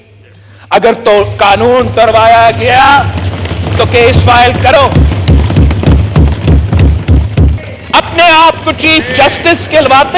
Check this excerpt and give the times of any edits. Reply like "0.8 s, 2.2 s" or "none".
7.7 s

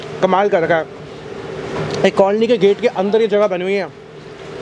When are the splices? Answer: none

